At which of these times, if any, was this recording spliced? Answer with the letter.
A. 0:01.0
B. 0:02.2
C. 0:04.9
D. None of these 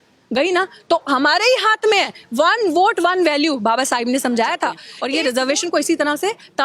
C